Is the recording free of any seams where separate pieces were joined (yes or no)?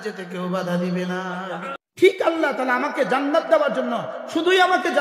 no